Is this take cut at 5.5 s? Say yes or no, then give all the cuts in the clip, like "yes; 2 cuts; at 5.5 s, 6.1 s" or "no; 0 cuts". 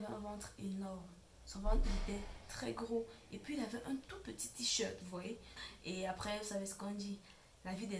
yes; 1 cut; at 5.5 s